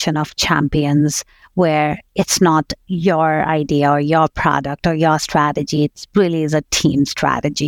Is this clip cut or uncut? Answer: uncut